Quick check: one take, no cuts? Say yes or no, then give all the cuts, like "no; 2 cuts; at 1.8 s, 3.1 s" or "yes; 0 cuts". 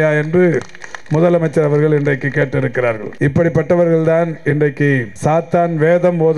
no; 2 cuts; at 3.1 s, 5.1 s